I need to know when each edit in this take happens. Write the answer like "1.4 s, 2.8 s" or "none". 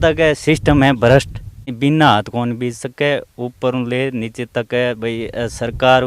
1.7 s